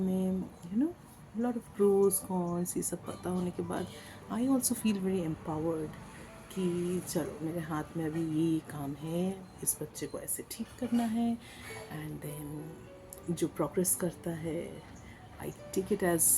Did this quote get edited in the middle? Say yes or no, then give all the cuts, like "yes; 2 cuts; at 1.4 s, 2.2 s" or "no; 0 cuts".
no; 0 cuts